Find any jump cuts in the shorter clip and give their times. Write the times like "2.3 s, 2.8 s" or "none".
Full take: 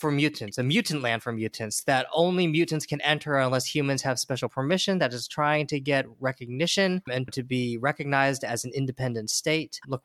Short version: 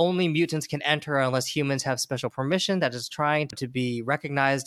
3.5 s

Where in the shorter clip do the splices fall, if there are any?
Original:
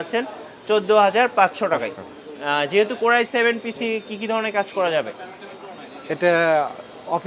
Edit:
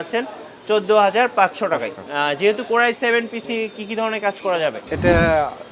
2.0 s, 4.9 s

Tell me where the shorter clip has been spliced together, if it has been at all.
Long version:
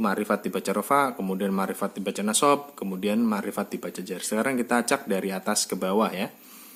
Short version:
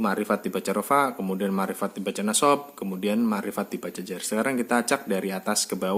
none

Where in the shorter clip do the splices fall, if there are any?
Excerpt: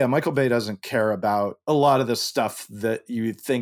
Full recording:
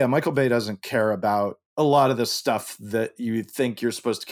1.6 s

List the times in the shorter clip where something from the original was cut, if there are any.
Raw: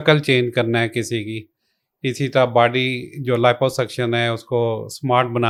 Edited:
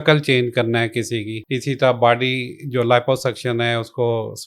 1.4 s

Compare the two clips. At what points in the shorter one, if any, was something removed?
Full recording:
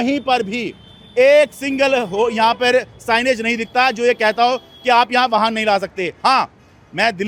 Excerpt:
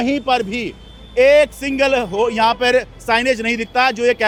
none

